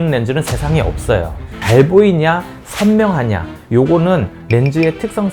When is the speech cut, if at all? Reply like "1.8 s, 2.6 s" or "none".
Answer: 1.6 s

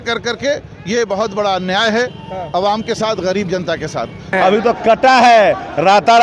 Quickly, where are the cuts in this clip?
4.3 s

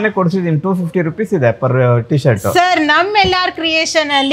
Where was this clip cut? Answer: none

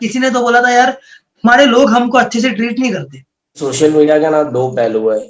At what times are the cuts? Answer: 3.7 s

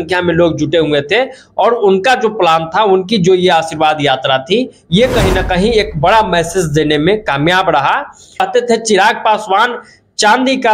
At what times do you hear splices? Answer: 8.4 s

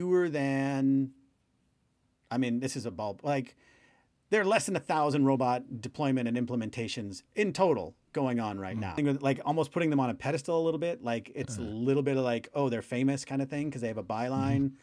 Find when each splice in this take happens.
9.0 s

